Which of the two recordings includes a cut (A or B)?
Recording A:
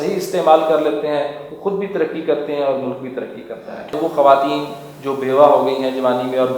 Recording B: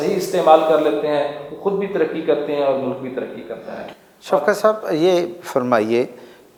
A